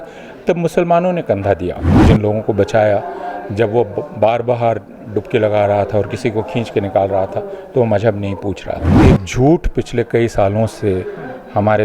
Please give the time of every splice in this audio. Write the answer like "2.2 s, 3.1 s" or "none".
1.9 s, 8.9 s